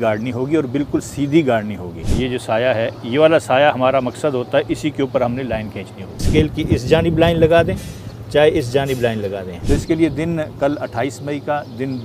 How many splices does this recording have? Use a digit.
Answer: 3